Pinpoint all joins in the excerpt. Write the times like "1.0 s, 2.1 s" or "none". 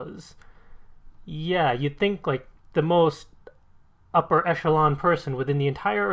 none